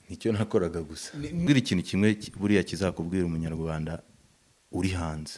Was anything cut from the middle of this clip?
yes; 1 cut; at 1.5 s

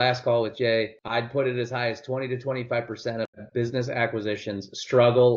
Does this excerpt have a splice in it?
yes; 1 cut; at 1.0 s

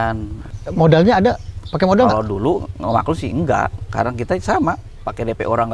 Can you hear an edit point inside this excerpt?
no; 0 cuts

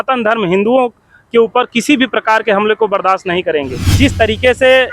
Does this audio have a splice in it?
yes; 1 cut; at 3.8 s

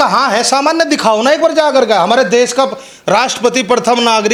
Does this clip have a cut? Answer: no; 0 cuts

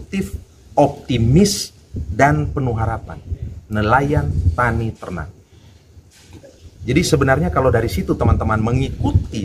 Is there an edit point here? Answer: no; 0 cuts

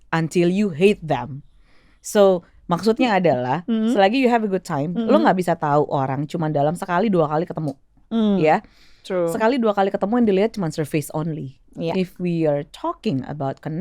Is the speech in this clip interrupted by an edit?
no; 0 cuts

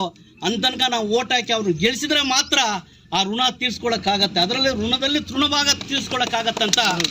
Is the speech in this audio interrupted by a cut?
no; 0 cuts

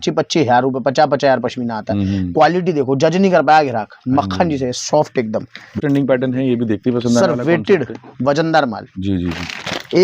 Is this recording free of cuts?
no; 1 cut; at 5.8 s

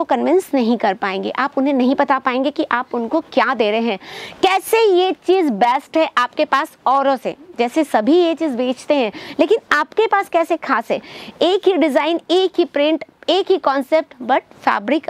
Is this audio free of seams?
yes; 0 cuts

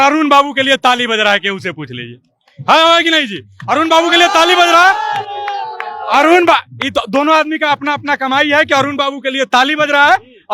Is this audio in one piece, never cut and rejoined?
yes; 0 cuts

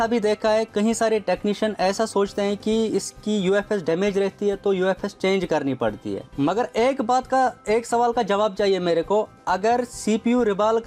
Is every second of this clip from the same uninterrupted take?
yes; 0 cuts

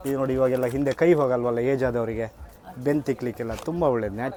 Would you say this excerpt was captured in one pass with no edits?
yes; 0 cuts

